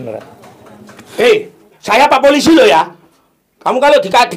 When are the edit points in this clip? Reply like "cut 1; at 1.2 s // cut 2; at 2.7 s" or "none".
cut 1; at 1.0 s